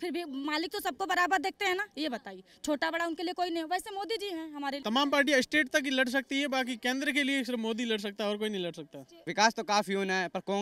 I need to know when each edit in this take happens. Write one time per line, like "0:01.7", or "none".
0:04.8
0:09.2